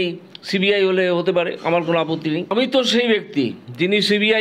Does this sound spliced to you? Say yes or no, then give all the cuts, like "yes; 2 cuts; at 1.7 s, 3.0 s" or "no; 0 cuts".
yes; 1 cut; at 2.5 s